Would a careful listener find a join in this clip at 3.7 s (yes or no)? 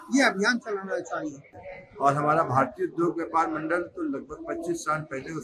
no